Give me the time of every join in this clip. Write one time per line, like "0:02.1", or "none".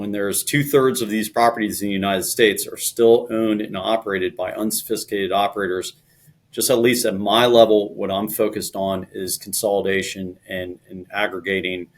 0:01.3